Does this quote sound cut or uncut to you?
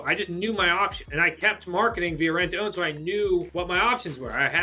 cut